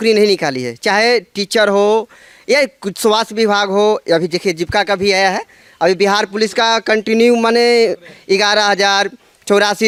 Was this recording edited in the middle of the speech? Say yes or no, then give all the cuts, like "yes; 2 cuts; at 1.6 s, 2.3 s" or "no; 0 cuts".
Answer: no; 0 cuts